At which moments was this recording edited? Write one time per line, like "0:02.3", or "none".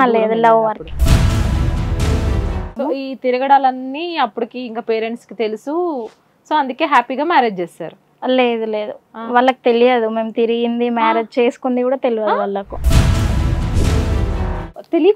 0:00.9
0:02.7